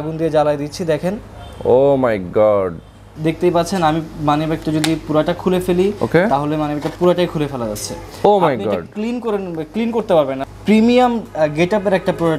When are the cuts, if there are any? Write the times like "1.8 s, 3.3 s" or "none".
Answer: 3.1 s, 10.4 s